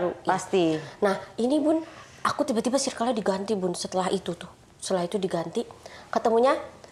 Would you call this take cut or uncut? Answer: uncut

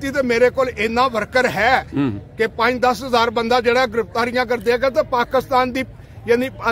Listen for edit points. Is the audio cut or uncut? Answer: uncut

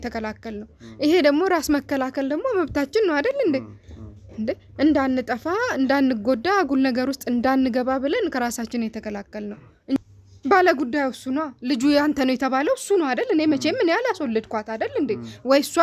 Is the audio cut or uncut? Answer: cut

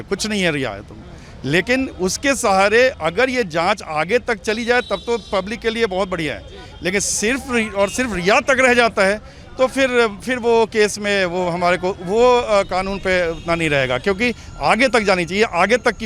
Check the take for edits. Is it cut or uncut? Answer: uncut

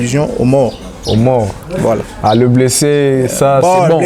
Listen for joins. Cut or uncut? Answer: uncut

